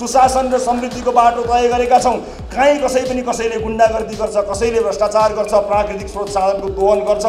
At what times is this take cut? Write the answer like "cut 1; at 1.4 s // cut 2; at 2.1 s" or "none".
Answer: none